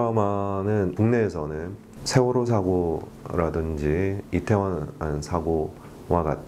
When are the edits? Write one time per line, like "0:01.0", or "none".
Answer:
0:00.9